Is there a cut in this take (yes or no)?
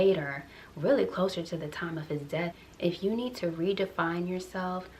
yes